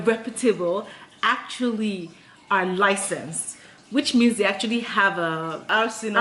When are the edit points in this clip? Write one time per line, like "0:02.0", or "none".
none